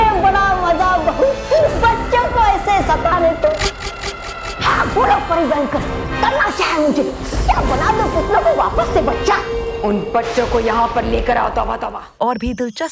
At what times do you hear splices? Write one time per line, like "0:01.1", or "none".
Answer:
0:11.9